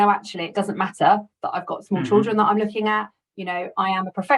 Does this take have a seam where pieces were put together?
no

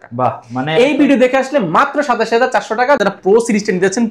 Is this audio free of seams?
no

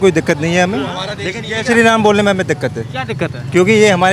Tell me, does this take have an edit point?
no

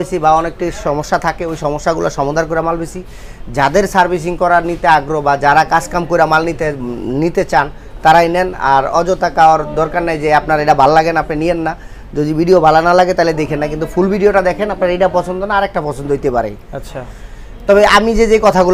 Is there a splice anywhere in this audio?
no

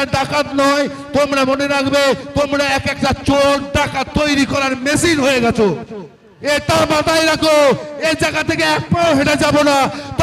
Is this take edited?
yes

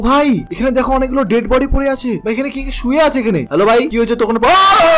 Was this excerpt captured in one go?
yes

